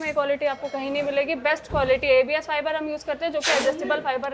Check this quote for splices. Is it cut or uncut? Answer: uncut